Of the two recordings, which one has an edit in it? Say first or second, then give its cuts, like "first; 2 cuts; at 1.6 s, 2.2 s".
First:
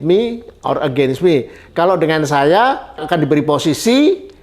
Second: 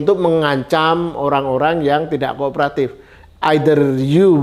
first; 1 cut; at 3.0 s